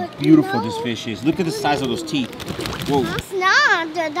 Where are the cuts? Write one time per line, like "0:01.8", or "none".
0:03.3